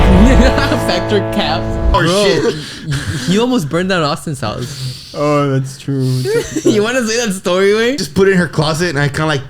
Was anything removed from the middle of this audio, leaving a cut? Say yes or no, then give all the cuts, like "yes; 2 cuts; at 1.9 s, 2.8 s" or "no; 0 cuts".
yes; 2 cuts; at 1.9 s, 8.0 s